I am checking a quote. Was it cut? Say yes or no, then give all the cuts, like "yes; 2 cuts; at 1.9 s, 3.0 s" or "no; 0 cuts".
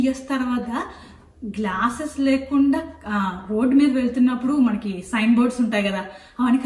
no; 0 cuts